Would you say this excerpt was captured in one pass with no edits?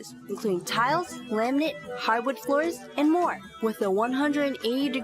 no; 3 cuts; at 1.2 s, 1.9 s, 3.5 s

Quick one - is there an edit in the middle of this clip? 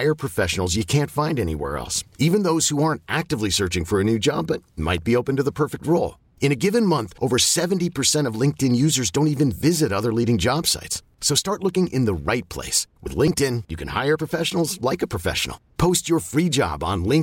no; 0 cuts

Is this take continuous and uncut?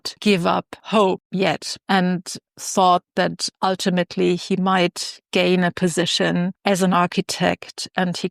no; 2 cuts; at 1.3 s, 6.6 s

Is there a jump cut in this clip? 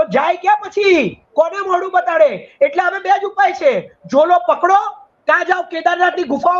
no; 0 cuts

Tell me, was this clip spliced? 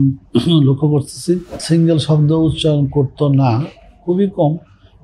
yes; 1 cut; at 1.5 s

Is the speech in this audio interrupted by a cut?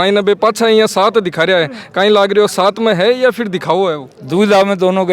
yes; 1 cut; at 4.1 s

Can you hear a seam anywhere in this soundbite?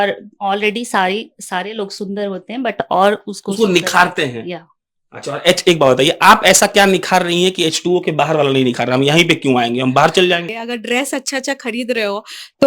yes; 1 cut; at 10.5 s

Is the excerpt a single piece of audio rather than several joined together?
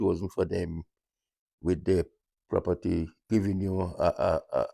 no; 1 cut; at 3.2 s

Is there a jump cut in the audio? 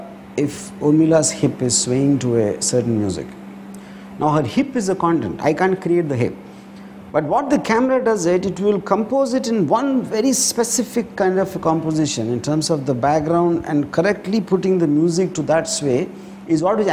no; 0 cuts

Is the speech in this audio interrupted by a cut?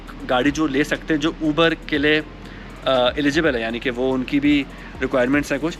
no; 0 cuts

